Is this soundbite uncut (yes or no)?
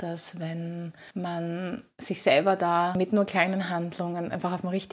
no